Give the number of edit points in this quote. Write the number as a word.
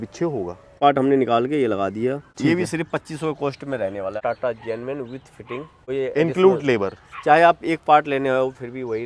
four